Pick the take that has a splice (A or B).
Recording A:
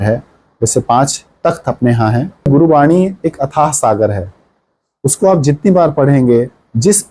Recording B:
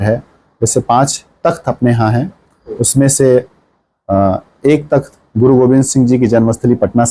A